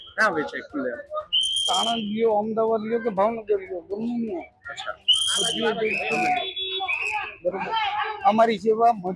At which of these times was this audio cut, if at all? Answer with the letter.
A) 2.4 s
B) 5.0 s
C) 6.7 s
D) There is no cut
D